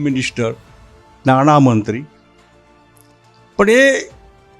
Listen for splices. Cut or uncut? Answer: cut